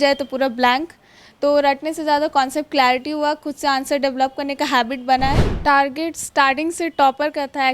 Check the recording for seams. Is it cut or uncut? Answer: cut